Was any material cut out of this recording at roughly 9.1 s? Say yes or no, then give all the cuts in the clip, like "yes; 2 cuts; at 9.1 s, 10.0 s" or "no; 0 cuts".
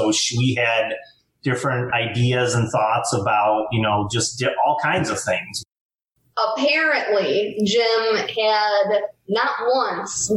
no; 1 cut; at 5.7 s